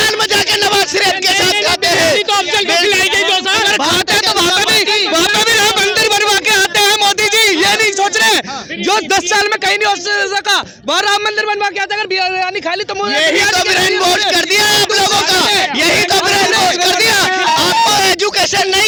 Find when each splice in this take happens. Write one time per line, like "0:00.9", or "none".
none